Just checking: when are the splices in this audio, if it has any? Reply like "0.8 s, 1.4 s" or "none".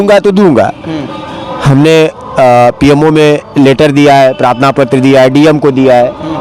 none